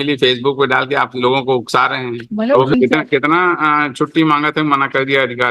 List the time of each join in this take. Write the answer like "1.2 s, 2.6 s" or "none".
2.7 s